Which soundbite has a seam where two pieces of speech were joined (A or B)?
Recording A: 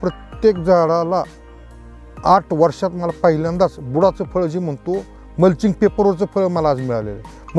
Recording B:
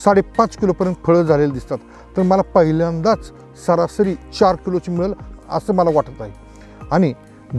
B